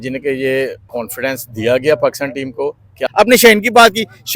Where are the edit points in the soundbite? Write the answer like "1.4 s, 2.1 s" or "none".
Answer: 3.0 s